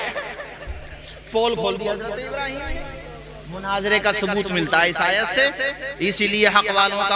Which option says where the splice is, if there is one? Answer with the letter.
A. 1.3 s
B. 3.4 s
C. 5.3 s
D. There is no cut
D